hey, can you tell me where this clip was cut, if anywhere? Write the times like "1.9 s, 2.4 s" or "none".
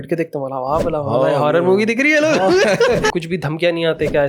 3.2 s